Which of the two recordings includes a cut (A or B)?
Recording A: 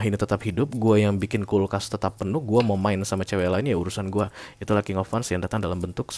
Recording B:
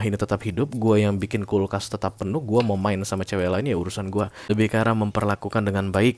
B